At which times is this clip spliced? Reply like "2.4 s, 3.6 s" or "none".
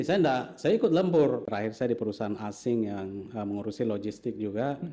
1.4 s